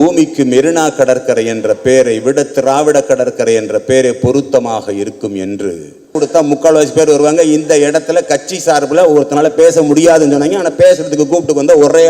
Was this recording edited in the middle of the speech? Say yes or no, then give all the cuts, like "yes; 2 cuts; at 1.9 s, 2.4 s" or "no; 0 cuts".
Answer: yes; 1 cut; at 6.1 s